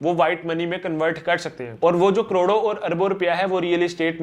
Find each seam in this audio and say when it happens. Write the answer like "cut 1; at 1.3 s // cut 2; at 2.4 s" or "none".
cut 1; at 1.7 s